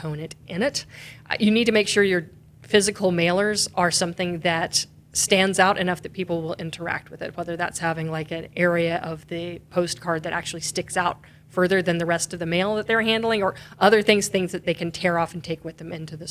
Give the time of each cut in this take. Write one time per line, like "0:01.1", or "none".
none